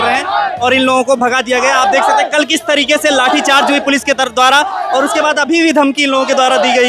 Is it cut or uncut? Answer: uncut